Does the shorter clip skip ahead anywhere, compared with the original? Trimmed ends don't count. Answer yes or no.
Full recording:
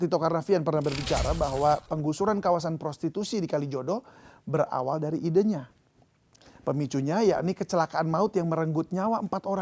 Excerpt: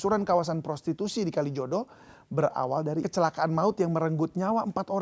yes